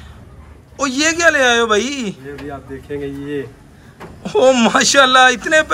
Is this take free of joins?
yes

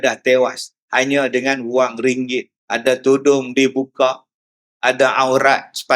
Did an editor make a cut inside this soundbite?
yes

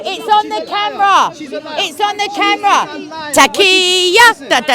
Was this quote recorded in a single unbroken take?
yes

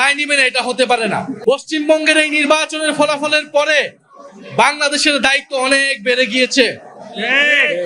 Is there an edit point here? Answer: yes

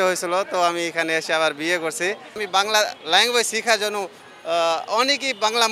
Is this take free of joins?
no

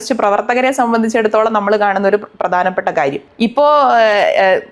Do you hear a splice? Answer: yes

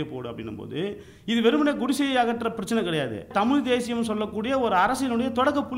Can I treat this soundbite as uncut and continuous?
no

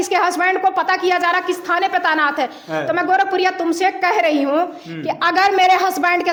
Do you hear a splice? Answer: no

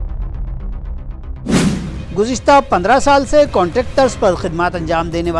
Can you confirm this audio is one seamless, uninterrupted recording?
no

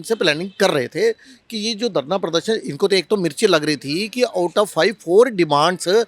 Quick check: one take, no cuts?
yes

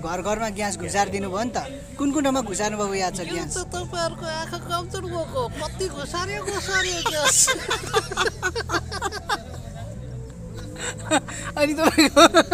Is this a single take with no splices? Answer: yes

